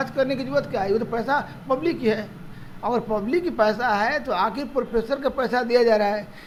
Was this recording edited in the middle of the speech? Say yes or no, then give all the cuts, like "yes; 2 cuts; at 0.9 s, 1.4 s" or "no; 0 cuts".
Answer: no; 0 cuts